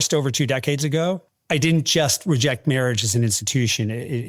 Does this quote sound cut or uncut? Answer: cut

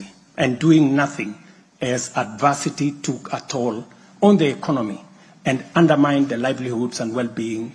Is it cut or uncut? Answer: uncut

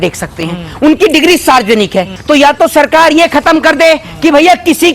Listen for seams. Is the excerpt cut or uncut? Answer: cut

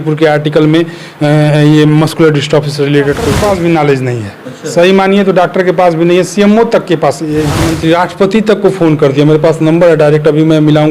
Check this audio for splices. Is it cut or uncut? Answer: cut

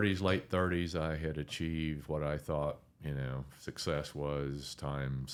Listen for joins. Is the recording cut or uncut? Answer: uncut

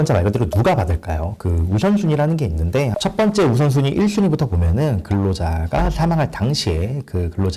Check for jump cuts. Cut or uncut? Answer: cut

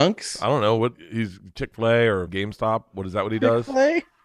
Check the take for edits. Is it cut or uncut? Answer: cut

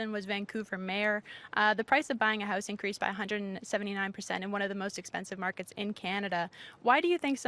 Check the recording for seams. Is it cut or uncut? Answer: uncut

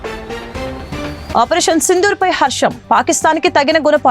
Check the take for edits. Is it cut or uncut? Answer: cut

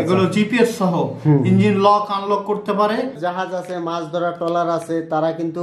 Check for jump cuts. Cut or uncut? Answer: cut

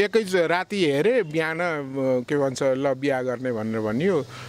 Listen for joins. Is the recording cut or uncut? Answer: uncut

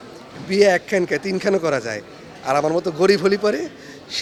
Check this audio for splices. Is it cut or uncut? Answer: uncut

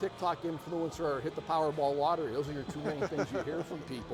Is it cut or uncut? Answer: uncut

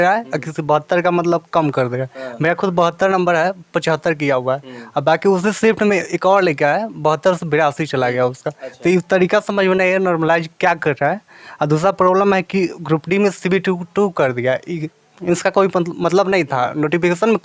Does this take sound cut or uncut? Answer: uncut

